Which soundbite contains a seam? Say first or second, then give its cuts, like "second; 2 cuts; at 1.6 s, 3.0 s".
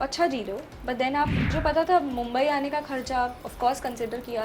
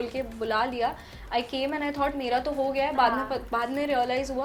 first; 1 cut; at 1.5 s